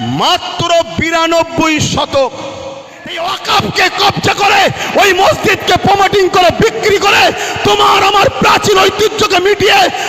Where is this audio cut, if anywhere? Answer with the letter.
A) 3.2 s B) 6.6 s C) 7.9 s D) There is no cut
A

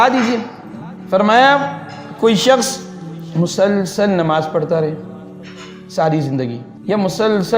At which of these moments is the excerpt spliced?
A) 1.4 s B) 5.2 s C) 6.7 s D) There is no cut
C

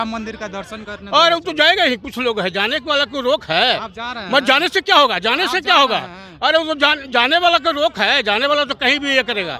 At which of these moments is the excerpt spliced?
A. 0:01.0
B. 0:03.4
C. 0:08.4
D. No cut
D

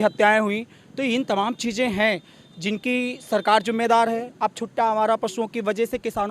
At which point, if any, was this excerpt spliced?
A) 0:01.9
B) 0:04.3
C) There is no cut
C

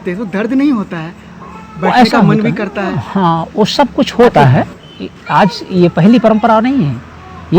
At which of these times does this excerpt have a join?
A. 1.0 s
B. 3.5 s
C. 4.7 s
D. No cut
C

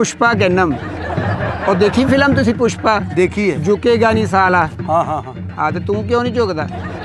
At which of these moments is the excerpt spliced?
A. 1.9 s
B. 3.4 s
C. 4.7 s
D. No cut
D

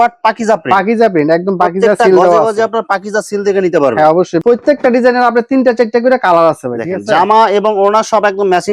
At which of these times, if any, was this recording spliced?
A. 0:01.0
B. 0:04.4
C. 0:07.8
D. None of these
B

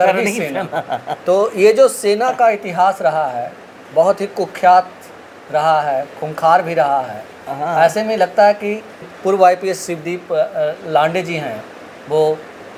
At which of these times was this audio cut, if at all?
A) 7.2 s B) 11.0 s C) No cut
C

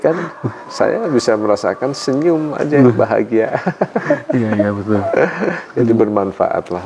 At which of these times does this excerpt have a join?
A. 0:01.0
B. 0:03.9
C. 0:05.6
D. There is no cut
D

